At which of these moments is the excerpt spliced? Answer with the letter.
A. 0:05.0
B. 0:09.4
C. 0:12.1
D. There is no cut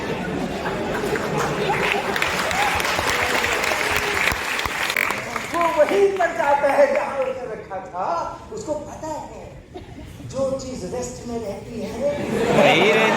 A